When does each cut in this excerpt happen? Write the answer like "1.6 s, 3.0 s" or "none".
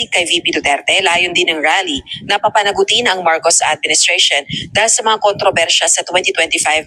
none